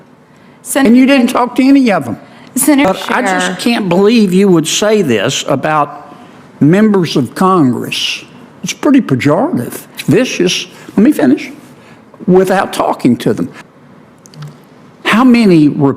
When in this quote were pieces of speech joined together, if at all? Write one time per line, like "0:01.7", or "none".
0:02.9
0:13.6